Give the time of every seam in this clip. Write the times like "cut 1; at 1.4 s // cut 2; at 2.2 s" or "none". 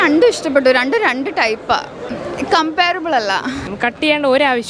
cut 1; at 2.2 s // cut 2; at 3.7 s